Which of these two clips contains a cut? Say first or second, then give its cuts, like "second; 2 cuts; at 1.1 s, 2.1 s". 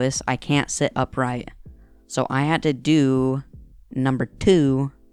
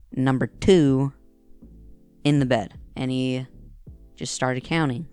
second; 1 cut; at 2.8 s